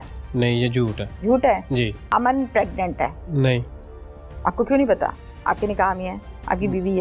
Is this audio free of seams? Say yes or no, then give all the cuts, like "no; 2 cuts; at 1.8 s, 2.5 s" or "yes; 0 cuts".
no; 3 cuts; at 1.1 s, 2.0 s, 3.2 s